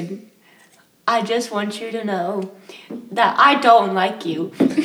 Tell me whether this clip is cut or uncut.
uncut